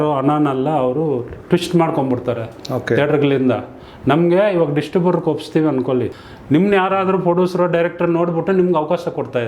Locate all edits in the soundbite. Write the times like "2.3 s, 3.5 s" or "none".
6.2 s